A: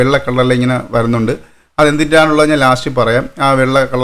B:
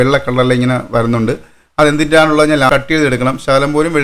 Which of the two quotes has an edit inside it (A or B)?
B